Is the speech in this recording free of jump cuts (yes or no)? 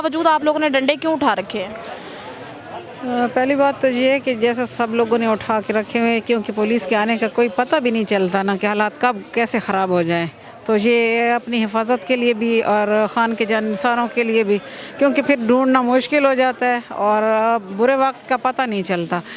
yes